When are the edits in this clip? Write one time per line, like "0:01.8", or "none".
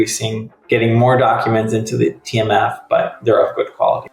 0:03.1